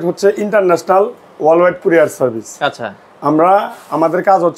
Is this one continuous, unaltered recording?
yes; 0 cuts

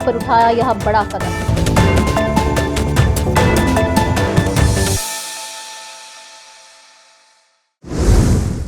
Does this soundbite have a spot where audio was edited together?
yes; 1 cut; at 7.7 s

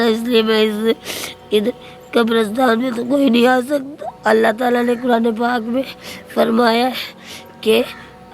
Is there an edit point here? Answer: yes; 1 cut; at 4.1 s

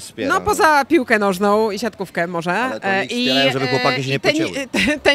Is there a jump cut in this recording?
no; 0 cuts

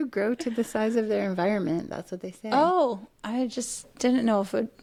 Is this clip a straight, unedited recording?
yes; 0 cuts

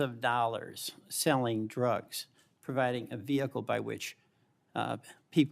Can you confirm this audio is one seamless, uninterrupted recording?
yes; 0 cuts

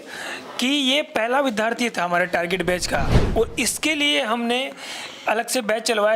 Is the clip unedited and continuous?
yes; 0 cuts

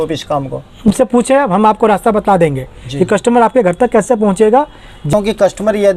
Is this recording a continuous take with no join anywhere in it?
no; 2 cuts; at 0.9 s, 5.1 s

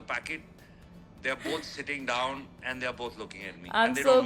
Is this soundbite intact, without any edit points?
yes; 0 cuts

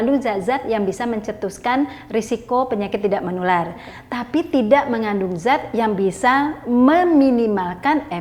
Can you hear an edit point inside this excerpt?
no; 0 cuts

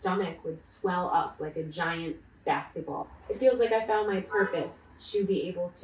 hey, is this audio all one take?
no; 1 cut; at 3.0 s

